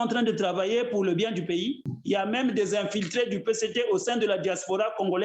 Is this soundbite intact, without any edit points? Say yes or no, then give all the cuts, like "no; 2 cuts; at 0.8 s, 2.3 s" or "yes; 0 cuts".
no; 1 cut; at 1.8 s